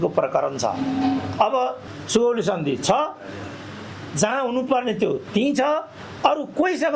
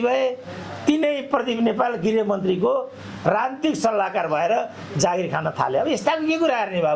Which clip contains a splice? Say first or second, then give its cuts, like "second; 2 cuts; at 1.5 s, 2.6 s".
first; 1 cut; at 1.9 s